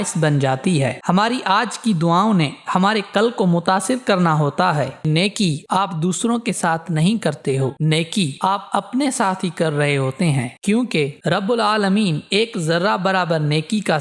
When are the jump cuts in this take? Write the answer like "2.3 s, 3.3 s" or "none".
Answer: 1.0 s, 5.1 s